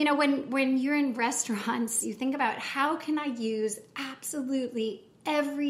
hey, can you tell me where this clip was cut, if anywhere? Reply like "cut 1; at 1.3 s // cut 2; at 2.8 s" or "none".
cut 1; at 2.0 s